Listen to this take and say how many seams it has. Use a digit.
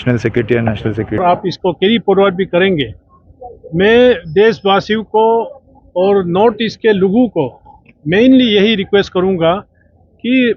1